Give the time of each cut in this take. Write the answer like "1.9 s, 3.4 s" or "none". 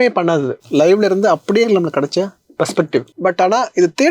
3.1 s

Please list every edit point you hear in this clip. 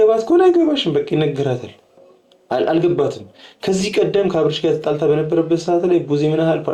none

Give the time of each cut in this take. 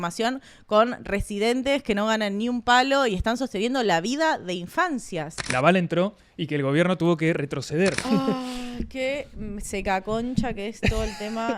5.4 s, 8.0 s

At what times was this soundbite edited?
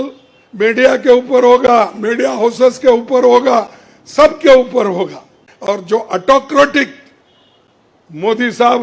5.4 s

